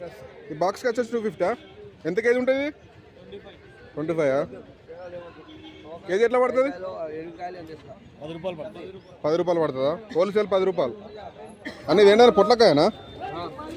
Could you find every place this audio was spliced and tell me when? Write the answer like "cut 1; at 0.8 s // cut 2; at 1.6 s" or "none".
cut 1; at 6.0 s // cut 2; at 11.7 s